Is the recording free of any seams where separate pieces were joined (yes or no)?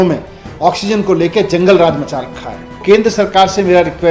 no